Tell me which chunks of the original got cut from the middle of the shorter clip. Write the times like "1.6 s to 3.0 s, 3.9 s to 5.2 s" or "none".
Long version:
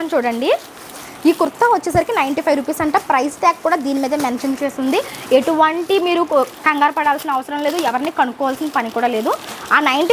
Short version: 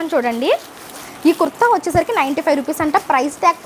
none